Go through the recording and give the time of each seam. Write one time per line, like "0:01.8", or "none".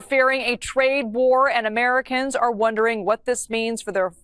none